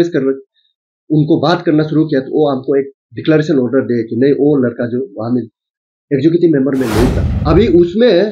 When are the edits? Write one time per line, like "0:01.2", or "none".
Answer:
0:07.3